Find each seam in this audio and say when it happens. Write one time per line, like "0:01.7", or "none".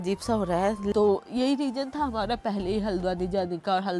0:00.9